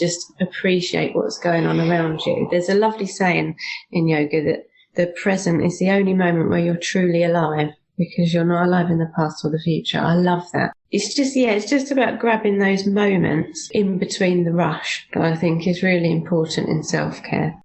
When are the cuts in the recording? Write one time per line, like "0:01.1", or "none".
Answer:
0:10.8
0:13.6